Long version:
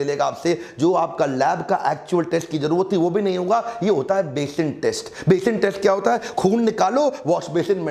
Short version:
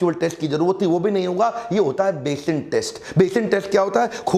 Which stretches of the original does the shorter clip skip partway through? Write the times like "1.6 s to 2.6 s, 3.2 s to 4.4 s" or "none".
none